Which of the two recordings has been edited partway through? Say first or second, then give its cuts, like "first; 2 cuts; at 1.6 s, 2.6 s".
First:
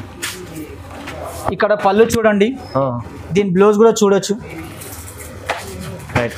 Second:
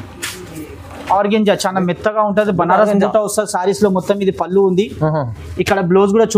second; 1 cut; at 1.1 s